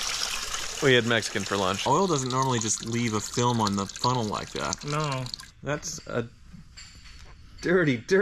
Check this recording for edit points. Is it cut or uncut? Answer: cut